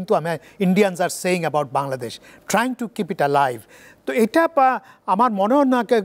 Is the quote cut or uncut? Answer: uncut